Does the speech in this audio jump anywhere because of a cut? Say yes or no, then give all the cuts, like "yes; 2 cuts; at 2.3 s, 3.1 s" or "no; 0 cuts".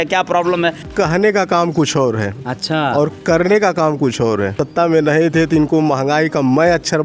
yes; 2 cuts; at 0.9 s, 4.6 s